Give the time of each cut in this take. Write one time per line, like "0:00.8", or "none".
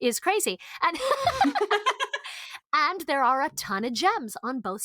0:02.5